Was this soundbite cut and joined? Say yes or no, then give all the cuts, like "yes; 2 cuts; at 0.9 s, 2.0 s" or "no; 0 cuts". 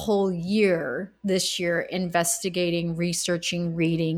no; 0 cuts